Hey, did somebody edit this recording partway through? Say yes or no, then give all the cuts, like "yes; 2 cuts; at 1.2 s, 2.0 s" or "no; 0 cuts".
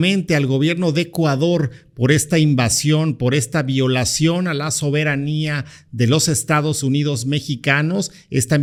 no; 0 cuts